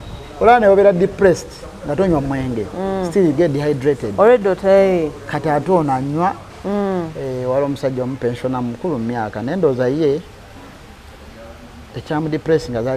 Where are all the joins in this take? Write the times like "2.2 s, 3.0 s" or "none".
6.5 s